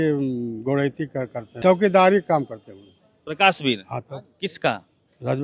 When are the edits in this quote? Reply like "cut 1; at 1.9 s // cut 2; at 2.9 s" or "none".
cut 1; at 1.6 s

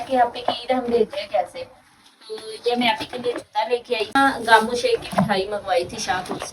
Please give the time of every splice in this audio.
cut 1; at 4.2 s

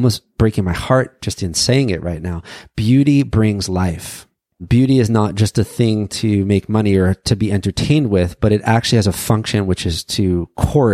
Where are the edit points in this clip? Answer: cut 1; at 4.6 s

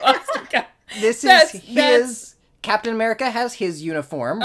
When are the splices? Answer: none

